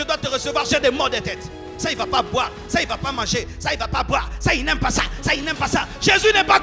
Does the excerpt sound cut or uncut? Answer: uncut